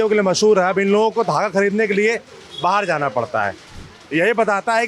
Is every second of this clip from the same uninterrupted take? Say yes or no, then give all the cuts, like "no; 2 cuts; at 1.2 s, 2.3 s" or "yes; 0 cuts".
yes; 0 cuts